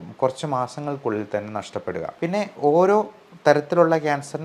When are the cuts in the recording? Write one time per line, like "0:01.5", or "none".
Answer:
0:02.1